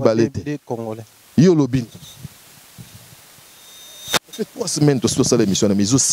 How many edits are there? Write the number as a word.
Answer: zero